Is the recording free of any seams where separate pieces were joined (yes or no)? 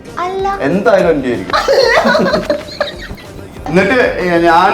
no